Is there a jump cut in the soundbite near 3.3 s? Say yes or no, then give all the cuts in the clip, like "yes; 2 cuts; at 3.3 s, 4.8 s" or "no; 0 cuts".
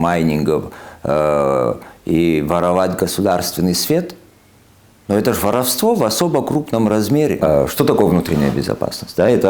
no; 1 cut; at 7.4 s